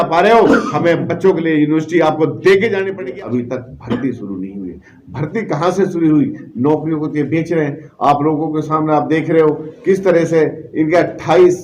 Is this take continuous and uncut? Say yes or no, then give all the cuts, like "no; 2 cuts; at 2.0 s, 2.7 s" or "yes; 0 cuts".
no; 1 cut; at 2.9 s